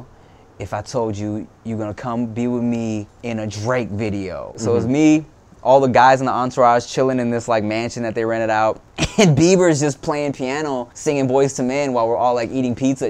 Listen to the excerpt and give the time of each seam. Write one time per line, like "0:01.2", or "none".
0:03.1
0:04.6
0:08.9
0:10.9